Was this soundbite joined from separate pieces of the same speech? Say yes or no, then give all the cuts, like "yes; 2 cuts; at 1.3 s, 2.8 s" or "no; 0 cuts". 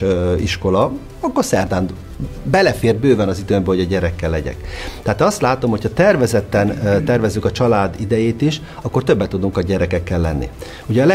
no; 0 cuts